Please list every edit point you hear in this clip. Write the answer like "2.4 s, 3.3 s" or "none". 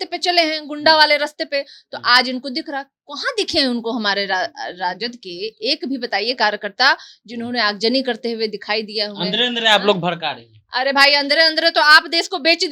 none